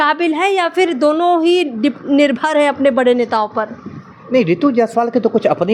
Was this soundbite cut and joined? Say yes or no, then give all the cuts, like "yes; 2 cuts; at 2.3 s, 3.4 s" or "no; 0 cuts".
no; 0 cuts